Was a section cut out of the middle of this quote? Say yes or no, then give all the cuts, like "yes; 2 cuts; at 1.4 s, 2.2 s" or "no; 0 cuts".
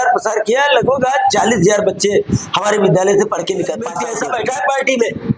yes; 1 cut; at 4.0 s